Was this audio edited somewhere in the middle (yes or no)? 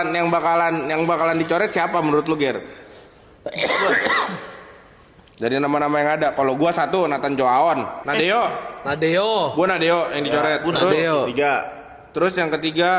yes